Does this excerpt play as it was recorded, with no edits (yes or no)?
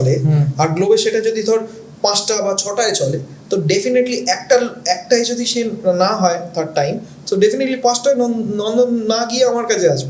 yes